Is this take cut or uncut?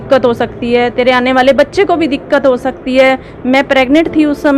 uncut